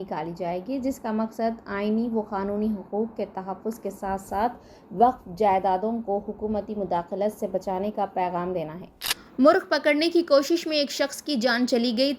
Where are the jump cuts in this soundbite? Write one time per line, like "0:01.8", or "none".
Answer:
0:09.2